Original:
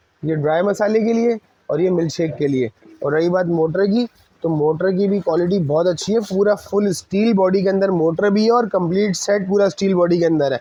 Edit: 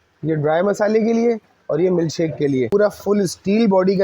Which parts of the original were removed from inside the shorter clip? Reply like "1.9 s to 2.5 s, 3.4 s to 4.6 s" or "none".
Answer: 2.7 s to 6.4 s